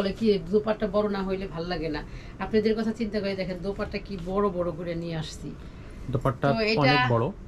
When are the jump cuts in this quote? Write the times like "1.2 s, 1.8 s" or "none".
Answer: none